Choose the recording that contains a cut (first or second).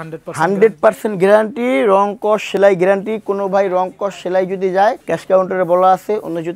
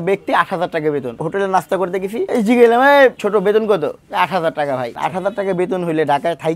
second